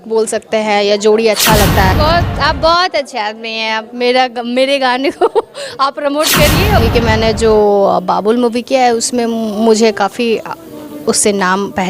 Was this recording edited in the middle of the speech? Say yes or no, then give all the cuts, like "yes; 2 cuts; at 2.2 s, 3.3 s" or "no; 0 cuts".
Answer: yes; 2 cuts; at 1.9 s, 6.8 s